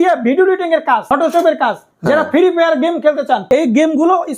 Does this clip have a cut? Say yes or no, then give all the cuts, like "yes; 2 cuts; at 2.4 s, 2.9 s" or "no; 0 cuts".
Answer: yes; 3 cuts; at 1.0 s, 1.8 s, 3.4 s